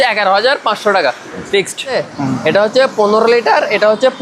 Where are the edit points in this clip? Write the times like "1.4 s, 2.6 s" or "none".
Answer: 1.9 s